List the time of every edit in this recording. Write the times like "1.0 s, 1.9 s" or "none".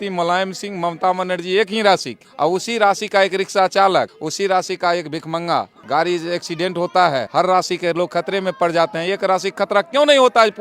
2.2 s, 4.2 s, 5.8 s, 7.3 s